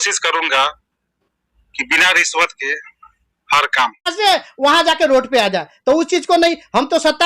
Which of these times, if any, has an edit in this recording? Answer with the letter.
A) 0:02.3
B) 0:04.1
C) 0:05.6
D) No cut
B